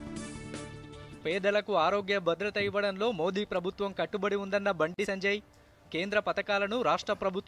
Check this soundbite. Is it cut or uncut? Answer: cut